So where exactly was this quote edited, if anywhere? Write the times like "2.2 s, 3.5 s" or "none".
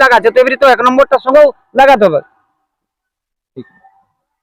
none